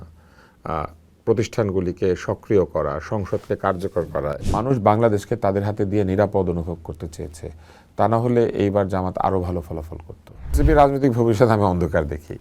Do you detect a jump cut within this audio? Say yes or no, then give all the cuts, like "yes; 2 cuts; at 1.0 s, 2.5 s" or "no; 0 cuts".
yes; 2 cuts; at 4.4 s, 10.6 s